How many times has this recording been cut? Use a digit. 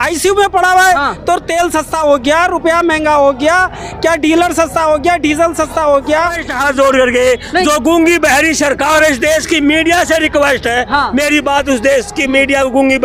1